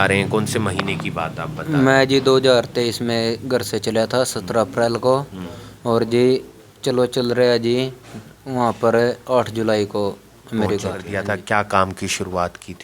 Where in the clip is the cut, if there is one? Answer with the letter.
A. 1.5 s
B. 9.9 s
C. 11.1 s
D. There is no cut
C